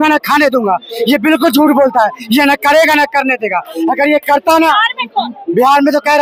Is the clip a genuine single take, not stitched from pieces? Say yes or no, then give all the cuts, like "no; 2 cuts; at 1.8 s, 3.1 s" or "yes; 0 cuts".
yes; 0 cuts